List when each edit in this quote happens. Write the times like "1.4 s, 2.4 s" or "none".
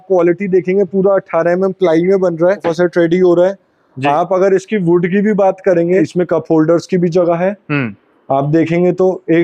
2.7 s, 6.1 s